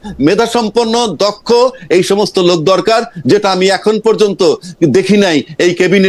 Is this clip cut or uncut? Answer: uncut